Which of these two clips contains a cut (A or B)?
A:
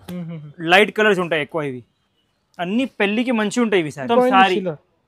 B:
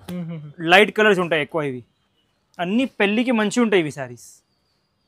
A